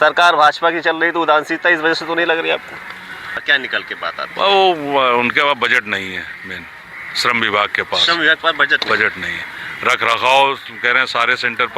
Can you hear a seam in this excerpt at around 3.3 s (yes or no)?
yes